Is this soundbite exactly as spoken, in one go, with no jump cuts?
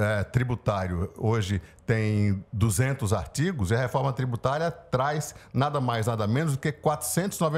yes; 0 cuts

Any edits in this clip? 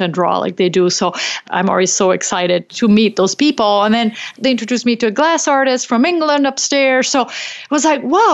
yes; 3 cuts; at 1.4 s, 2.7 s, 4.3 s

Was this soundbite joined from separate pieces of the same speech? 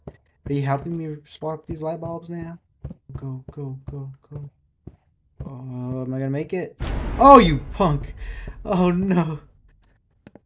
yes; 1 cut; at 3.1 s

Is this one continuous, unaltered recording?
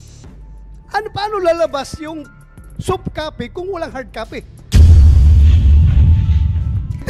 no; 1 cut; at 4.6 s

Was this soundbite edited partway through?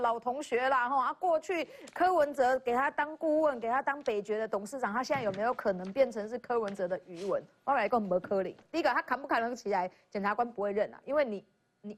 yes; 1 cut; at 8.5 s

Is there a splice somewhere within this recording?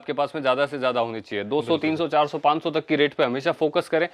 no; 0 cuts

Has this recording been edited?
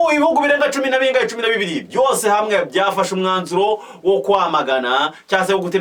no; 0 cuts

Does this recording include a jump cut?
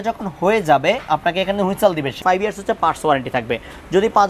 yes; 1 cut; at 2.2 s

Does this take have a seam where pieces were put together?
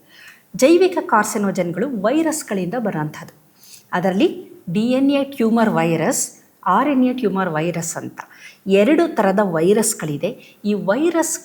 no; 0 cuts

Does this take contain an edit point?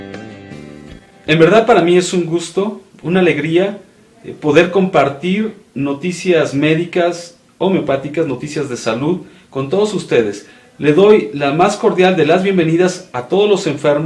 yes; 1 cut; at 2.6 s

